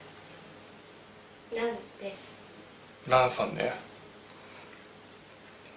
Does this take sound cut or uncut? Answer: uncut